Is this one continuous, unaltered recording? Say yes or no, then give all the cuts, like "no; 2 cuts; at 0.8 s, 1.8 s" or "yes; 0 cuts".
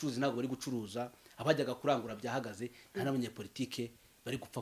yes; 0 cuts